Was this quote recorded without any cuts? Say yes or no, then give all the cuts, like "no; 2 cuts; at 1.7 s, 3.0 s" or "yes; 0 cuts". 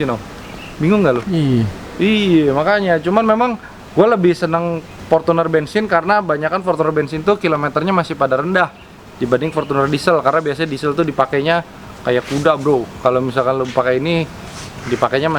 yes; 0 cuts